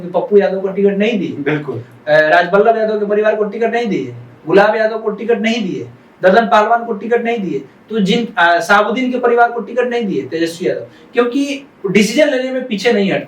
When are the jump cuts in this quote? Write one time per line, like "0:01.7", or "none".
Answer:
none